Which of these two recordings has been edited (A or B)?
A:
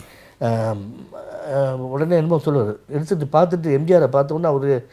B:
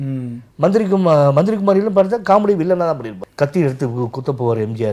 B